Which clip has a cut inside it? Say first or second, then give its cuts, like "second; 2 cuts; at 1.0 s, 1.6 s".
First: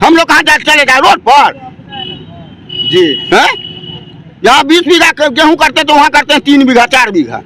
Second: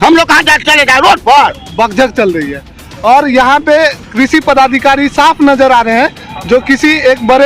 second; 1 cut; at 1.6 s